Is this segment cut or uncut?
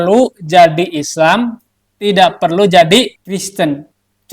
cut